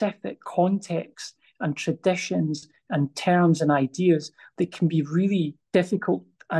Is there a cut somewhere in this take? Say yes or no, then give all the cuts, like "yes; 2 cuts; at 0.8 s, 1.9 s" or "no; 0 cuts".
yes; 1 cut; at 5.6 s